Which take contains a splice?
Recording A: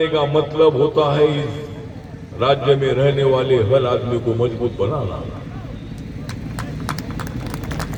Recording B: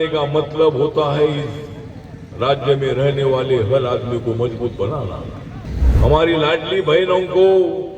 B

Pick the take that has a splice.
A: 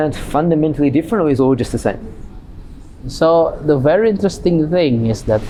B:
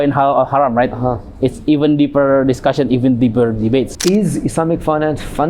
B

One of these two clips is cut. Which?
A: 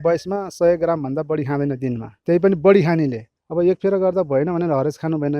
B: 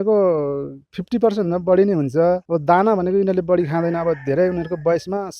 A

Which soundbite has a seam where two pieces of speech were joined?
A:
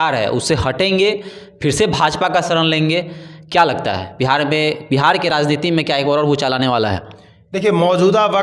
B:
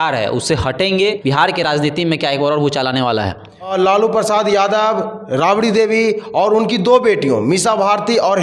B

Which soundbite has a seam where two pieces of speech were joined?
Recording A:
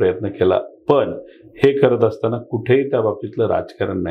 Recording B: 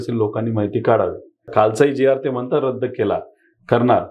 B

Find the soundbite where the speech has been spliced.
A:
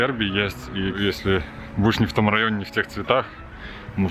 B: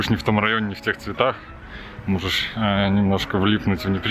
A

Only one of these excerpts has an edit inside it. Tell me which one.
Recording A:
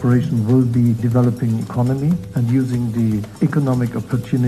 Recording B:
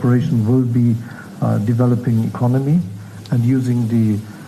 A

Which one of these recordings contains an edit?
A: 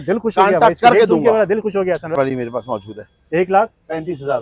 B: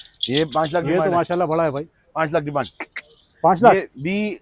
A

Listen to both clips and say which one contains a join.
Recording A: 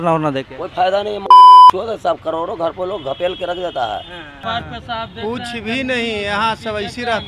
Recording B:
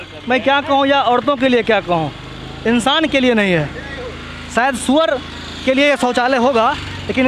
A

